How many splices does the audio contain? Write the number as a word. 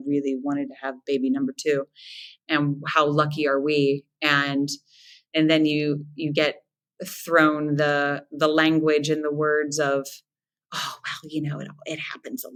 zero